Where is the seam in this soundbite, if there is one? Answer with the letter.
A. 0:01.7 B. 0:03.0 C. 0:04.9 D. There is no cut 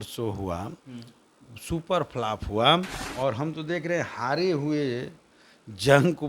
B